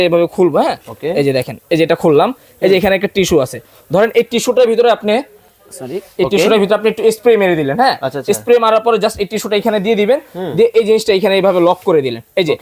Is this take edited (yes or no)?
no